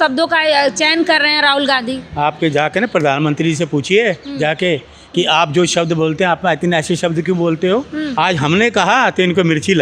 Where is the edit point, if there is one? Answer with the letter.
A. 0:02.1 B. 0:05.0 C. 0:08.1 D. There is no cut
C